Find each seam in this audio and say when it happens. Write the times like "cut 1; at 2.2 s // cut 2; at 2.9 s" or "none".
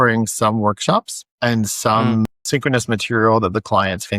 none